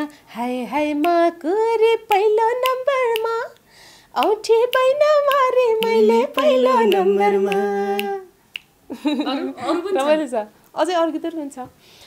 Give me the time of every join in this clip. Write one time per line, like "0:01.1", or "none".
none